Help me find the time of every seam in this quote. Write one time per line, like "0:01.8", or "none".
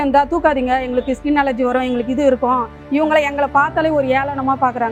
none